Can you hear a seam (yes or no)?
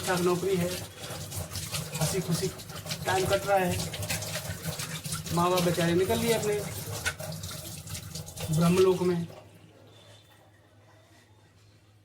no